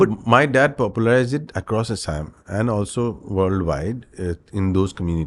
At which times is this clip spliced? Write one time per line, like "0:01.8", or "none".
none

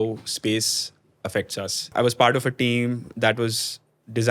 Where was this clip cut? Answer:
0:01.9

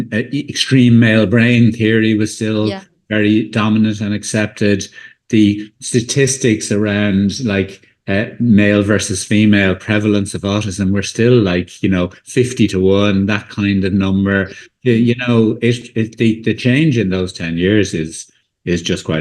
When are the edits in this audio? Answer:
none

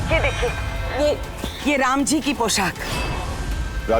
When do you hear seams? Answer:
0:02.8

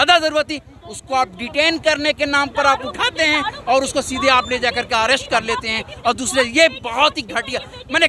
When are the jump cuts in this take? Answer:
none

